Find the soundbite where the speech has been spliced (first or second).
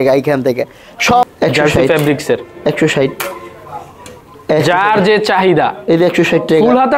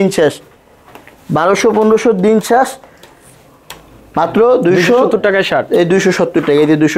first